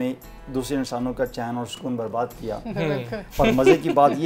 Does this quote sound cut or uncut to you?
uncut